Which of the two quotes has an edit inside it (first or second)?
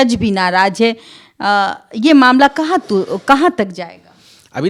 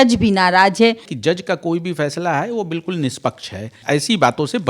second